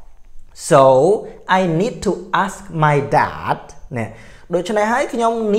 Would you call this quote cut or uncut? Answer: uncut